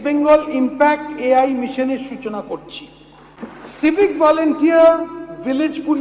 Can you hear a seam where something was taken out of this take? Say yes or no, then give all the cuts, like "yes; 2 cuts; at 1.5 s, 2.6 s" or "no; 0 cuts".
yes; 1 cut; at 3.6 s